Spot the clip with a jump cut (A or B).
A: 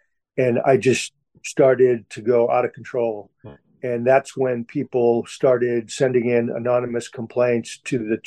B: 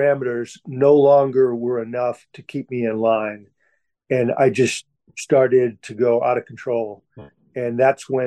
A